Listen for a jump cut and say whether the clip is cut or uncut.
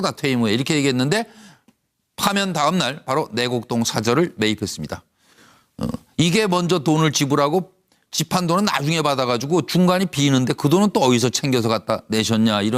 cut